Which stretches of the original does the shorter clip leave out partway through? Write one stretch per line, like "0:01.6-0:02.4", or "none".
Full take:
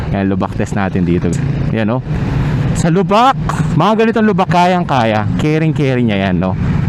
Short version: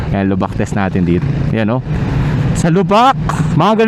0:01.2-0:01.4